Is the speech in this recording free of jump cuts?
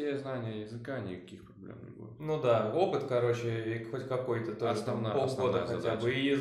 yes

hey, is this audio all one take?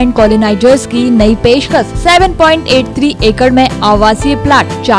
yes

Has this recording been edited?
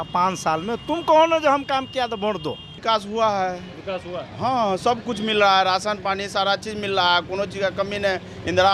yes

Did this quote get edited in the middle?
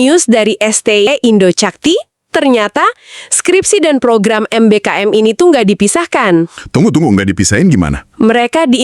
yes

